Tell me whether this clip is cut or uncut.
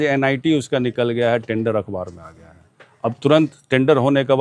uncut